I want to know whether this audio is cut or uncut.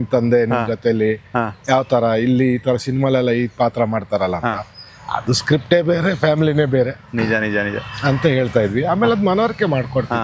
uncut